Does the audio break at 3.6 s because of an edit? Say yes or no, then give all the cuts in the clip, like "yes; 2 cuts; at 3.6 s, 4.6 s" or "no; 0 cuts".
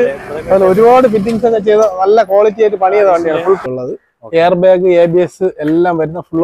yes; 1 cut; at 3.6 s